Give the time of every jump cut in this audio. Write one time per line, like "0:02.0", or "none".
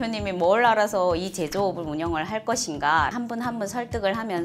0:03.1